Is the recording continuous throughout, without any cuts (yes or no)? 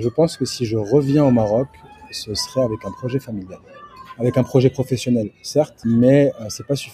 no